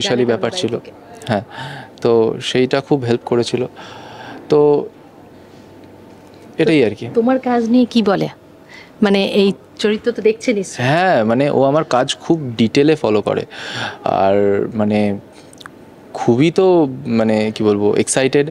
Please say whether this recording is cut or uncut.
uncut